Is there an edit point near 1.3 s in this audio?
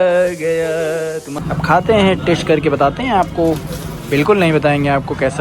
yes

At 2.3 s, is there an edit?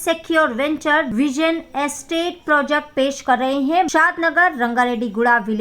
no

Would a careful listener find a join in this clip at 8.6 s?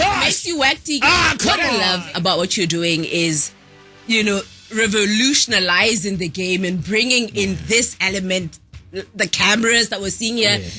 no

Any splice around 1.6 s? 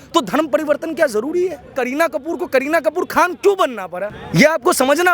yes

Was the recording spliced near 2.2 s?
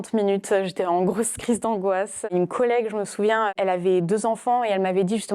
yes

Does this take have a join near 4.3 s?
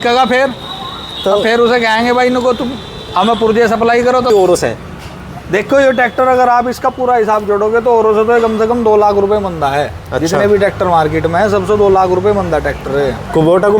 yes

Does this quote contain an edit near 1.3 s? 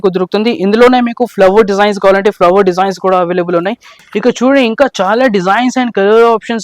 no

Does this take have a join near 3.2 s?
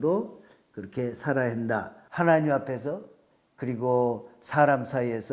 no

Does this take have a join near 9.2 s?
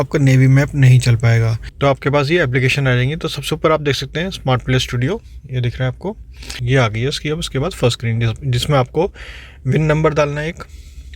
no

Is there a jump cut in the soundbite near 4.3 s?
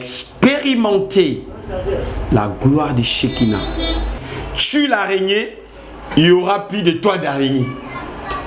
yes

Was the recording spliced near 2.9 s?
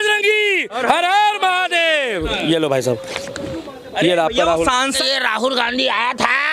no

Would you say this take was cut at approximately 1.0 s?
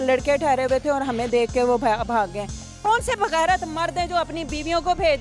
no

